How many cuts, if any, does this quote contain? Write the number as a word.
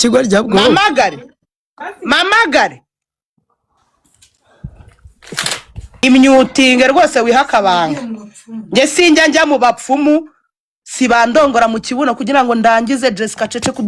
one